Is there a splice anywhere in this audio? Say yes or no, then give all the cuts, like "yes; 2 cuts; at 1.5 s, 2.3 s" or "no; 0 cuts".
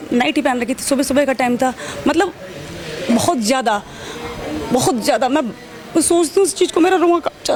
no; 0 cuts